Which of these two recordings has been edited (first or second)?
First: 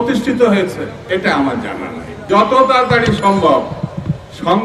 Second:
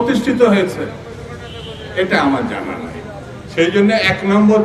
first